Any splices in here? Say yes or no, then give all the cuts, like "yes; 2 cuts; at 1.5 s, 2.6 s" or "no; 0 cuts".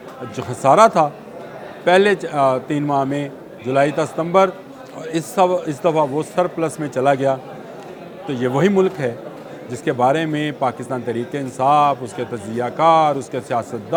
no; 0 cuts